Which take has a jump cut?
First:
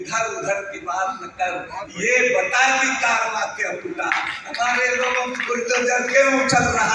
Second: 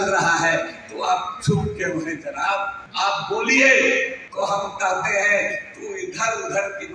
second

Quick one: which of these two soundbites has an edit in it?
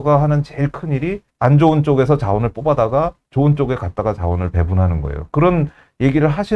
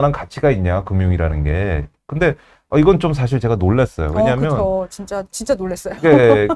first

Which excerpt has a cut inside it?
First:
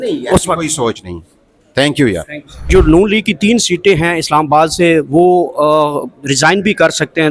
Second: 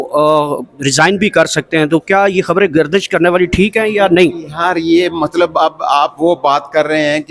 first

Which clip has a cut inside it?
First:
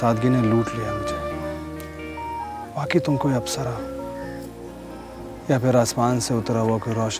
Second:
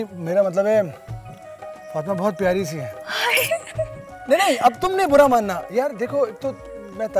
first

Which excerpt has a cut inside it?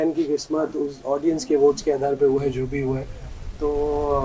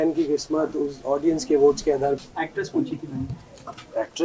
second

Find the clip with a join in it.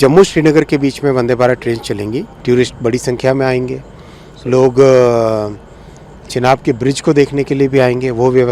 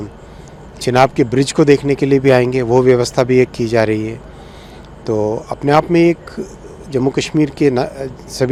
first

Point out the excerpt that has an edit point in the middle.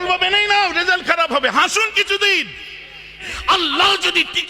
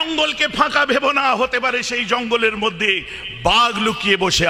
first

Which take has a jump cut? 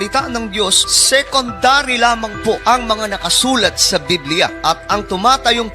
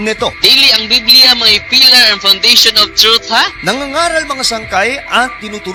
first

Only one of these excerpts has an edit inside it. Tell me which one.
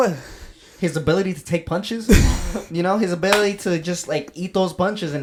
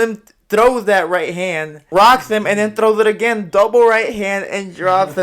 second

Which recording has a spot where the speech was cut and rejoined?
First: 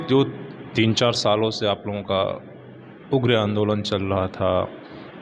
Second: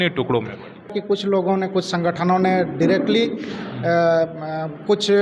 second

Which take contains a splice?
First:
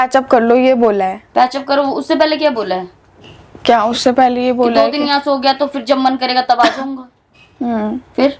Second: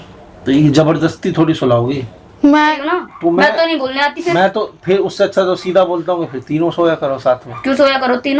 second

